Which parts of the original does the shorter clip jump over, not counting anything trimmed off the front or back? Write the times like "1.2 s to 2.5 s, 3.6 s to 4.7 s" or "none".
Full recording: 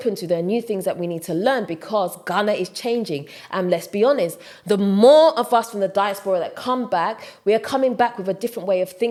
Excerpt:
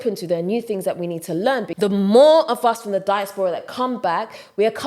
1.7 s to 4.6 s